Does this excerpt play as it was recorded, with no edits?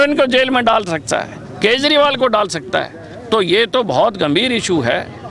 yes; 0 cuts

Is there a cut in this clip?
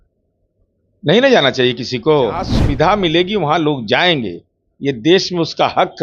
yes; 1 cut; at 2.6 s

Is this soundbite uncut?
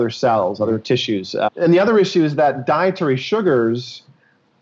no; 1 cut; at 1.5 s

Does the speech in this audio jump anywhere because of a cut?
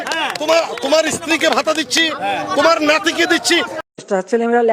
yes; 1 cut; at 3.8 s

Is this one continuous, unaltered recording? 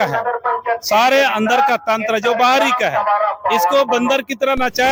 yes; 0 cuts

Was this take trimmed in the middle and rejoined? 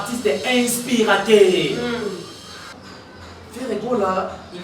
yes; 1 cut; at 2.8 s

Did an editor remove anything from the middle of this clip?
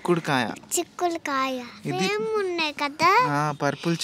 no; 0 cuts

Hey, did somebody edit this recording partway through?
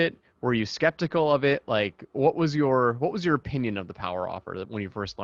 no; 0 cuts

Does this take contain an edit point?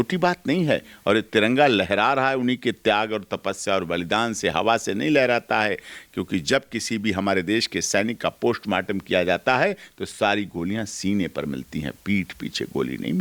no; 0 cuts

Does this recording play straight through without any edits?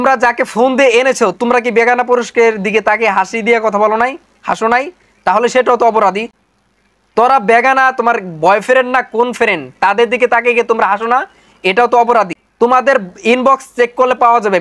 no; 2 cuts; at 6.5 s, 12.4 s

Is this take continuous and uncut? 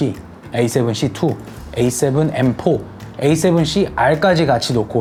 yes; 0 cuts

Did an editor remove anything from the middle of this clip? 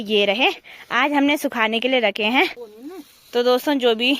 yes; 1 cut; at 2.7 s

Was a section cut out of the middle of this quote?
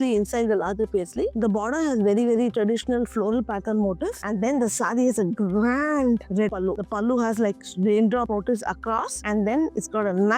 no; 0 cuts

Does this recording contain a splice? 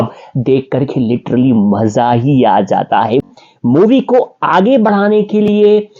yes; 1 cut; at 3.3 s

